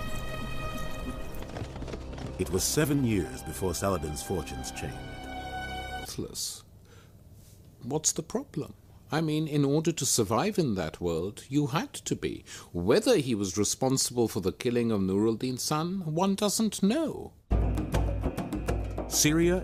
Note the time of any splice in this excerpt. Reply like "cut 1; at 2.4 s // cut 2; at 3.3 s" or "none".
none